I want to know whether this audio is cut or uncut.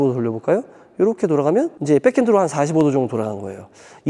cut